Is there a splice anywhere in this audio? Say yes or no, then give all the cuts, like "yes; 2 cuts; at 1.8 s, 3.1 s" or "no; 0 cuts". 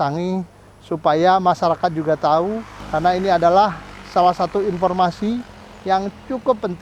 yes; 1 cut; at 2.8 s